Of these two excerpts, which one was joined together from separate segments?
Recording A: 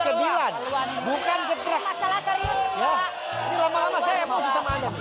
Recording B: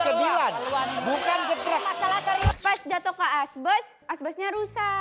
B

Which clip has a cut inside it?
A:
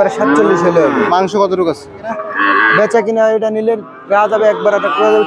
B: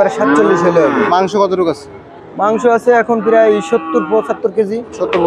A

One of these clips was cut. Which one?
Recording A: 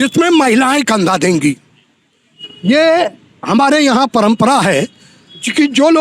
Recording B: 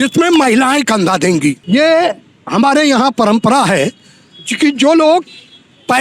B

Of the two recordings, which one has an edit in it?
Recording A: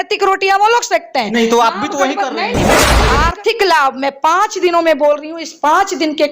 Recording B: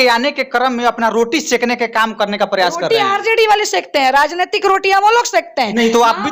A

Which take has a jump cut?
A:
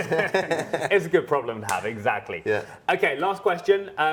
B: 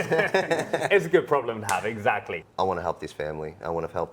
B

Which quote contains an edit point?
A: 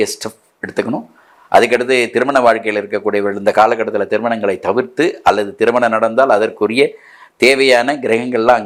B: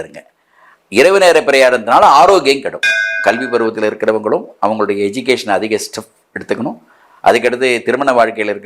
B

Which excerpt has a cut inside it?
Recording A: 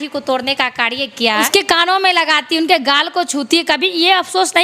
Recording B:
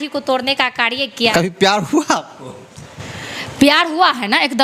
A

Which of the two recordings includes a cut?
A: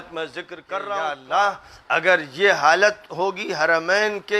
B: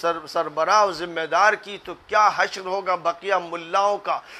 A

